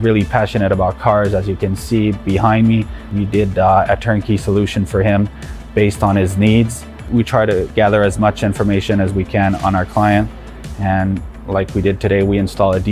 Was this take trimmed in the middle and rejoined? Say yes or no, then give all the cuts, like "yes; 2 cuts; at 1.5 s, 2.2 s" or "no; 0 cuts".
yes; 1 cut; at 0.9 s